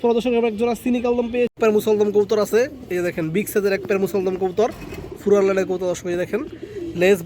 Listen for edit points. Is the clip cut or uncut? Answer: cut